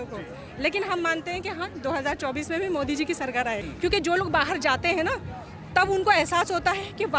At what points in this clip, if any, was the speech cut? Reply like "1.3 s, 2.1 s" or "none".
3.7 s